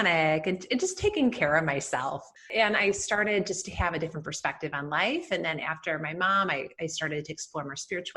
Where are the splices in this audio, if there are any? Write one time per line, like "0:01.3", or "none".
0:02.4

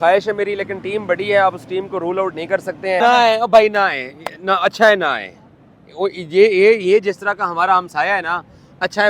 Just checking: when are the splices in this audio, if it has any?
0:03.0

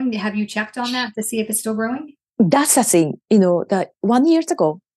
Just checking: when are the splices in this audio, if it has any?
none

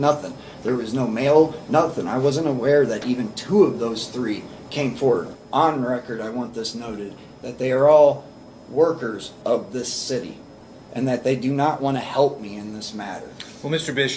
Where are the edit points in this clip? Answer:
0:05.3

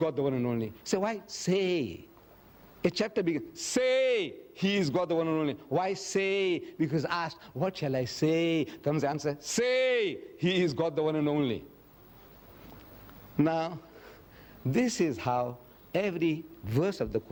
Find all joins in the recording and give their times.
none

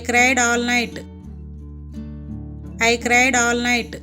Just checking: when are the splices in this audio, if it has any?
0:01.2
0:02.7

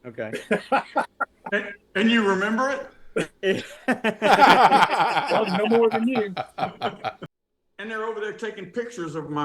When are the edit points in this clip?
0:07.3

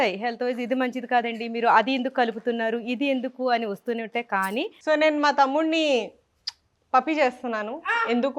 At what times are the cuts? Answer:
0:04.7

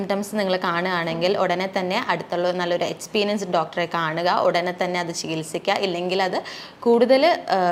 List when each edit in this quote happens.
none

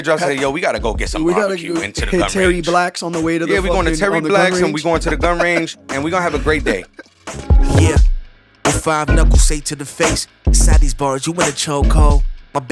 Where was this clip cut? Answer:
0:07.4

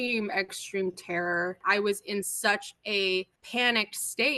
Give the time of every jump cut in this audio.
0:01.6
0:03.4

